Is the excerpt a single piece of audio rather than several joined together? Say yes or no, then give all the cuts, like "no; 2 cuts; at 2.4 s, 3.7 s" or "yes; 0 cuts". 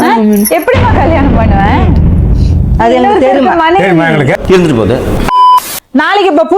no; 1 cut; at 5.4 s